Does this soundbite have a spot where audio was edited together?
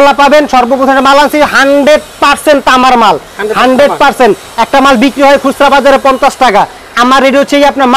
no; 0 cuts

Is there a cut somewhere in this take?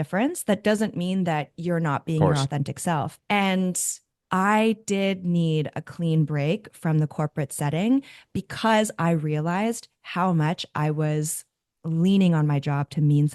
yes; 2 cuts; at 3.2 s, 4.1 s

